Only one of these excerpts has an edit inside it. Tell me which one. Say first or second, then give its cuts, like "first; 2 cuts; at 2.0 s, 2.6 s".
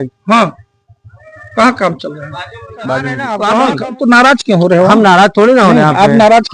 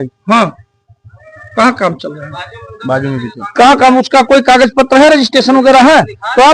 first; 1 cut; at 3.2 s